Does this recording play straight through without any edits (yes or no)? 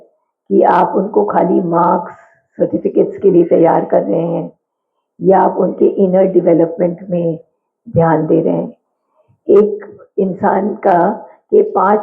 yes